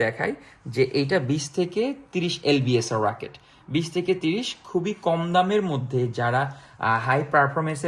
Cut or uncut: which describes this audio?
uncut